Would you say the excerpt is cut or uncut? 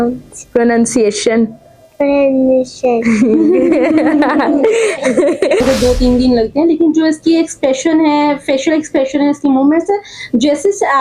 cut